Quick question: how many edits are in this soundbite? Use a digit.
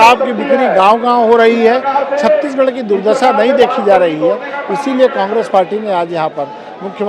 0